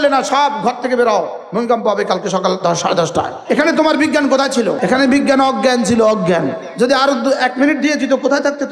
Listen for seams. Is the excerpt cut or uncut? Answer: cut